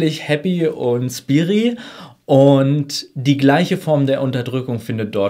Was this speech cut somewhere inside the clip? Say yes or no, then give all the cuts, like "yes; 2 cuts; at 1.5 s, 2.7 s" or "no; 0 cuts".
no; 0 cuts